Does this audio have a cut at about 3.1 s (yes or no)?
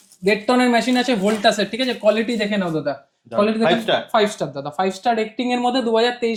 no